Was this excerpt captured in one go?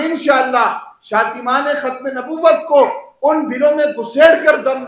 yes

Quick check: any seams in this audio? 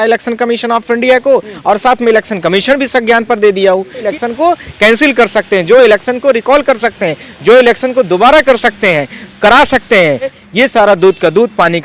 yes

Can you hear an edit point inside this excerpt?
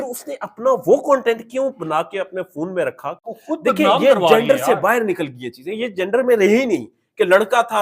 yes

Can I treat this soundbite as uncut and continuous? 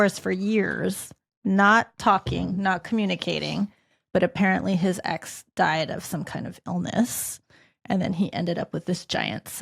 yes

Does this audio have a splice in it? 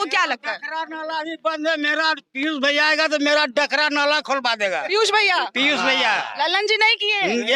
no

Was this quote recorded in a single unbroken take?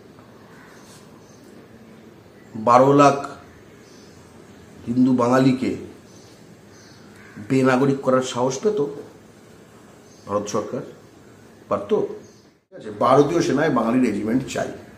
no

